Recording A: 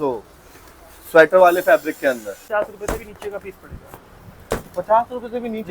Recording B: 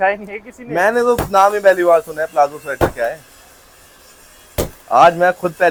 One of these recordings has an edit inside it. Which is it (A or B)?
A